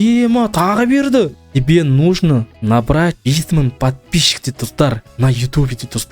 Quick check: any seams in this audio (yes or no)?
yes